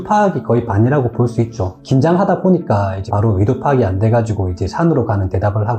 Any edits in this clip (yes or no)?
no